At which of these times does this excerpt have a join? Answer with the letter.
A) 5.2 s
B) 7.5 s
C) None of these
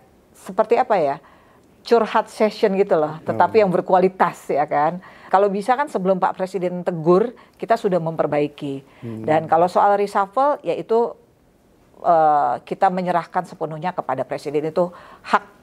A